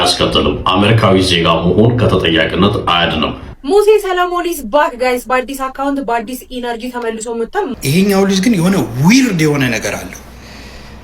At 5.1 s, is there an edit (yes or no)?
no